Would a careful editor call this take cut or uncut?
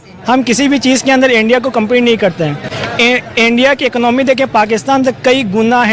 uncut